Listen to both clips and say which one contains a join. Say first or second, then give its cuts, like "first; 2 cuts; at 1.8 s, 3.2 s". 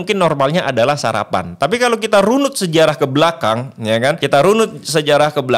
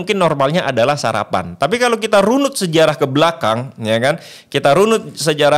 first; 1 cut; at 4.2 s